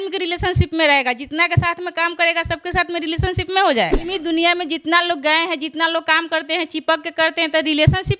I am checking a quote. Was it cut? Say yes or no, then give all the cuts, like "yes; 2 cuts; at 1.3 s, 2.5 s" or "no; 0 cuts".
yes; 1 cut; at 4.0 s